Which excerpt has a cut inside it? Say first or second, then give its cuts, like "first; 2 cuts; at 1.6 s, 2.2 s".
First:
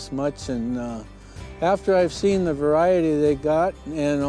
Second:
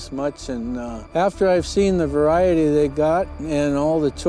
second; 1 cut; at 1.0 s